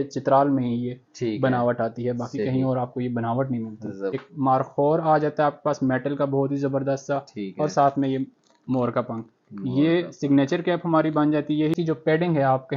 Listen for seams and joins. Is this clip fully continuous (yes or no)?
no